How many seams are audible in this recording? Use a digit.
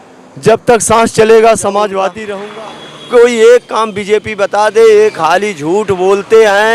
1